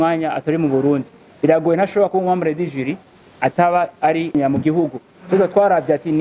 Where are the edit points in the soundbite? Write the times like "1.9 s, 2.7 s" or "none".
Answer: 4.3 s

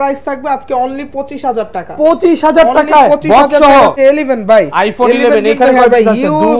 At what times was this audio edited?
3.9 s

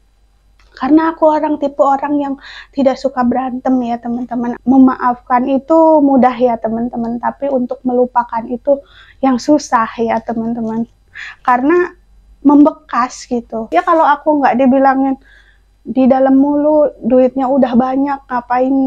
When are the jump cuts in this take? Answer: 4.5 s, 13.7 s

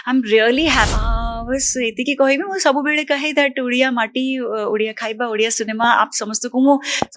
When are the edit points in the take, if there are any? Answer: 0.9 s

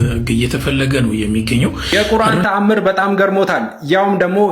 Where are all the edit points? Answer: 1.8 s

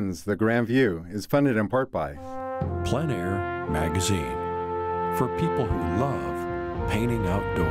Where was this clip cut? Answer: 2.2 s

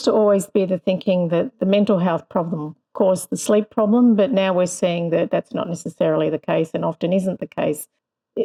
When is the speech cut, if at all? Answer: none

